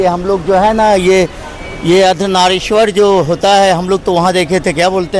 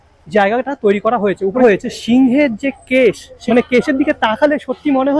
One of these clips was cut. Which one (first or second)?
second